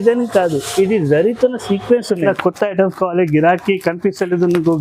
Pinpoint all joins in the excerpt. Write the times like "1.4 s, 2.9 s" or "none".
2.3 s